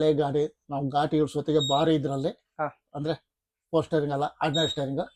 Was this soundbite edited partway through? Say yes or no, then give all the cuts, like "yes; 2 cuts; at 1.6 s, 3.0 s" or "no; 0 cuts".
no; 0 cuts